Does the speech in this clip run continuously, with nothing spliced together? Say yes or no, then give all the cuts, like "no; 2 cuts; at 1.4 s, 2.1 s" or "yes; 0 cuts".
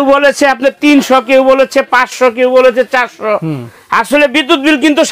yes; 0 cuts